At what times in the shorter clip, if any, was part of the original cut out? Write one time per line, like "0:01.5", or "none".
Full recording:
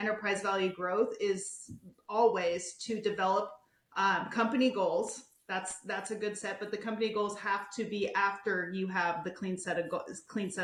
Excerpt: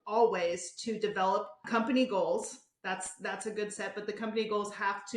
0:01.6